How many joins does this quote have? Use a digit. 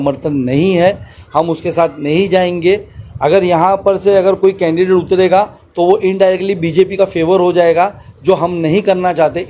0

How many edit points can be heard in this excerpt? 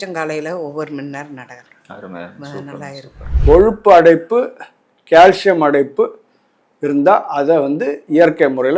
1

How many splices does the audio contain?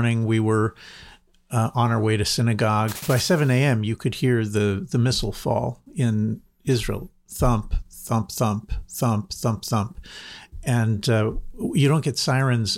1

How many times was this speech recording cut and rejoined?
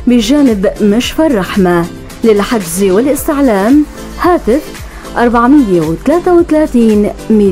0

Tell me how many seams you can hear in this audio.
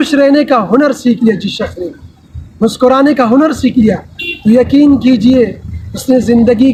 0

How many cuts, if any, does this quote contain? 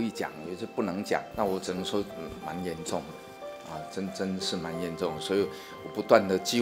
1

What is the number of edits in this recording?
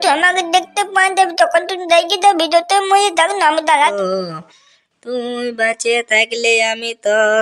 1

